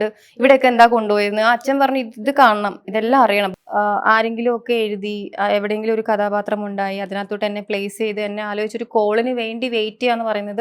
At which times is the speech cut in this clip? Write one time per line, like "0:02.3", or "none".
0:03.5